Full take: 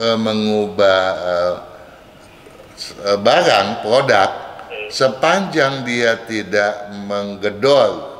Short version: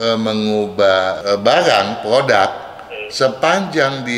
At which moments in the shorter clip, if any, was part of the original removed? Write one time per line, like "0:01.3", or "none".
0:01.2